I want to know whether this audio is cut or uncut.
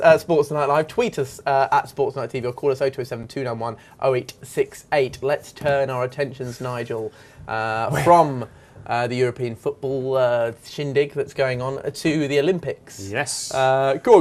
cut